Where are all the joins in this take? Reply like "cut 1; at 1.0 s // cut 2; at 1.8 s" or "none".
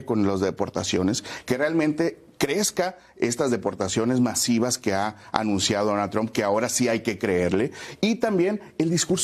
none

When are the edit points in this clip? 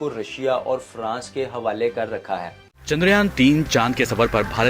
cut 1; at 2.6 s

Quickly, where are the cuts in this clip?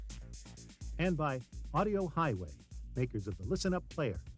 cut 1; at 0.9 s

